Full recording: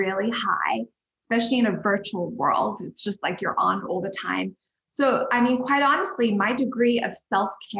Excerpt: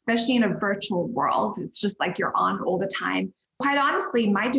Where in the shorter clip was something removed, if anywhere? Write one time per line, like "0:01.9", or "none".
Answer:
0:03.6